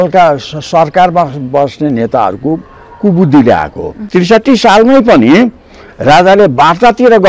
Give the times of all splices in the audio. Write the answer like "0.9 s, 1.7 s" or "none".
4.0 s